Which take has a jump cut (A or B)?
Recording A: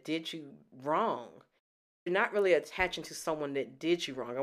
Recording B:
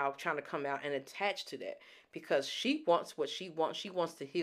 A